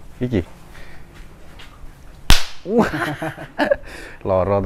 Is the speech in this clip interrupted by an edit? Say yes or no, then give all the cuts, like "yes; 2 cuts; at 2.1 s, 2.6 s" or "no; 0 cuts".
no; 0 cuts